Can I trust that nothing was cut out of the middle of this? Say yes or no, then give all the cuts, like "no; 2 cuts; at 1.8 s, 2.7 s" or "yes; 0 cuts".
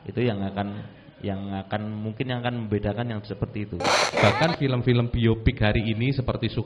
no; 1 cut; at 4.1 s